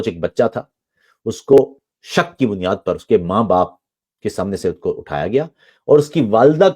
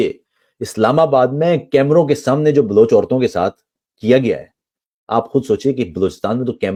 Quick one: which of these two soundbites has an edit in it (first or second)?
first